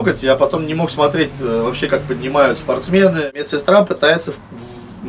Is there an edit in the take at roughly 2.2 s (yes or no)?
no